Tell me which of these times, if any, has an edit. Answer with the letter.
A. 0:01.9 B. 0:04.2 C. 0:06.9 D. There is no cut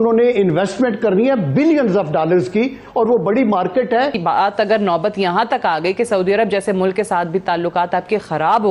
B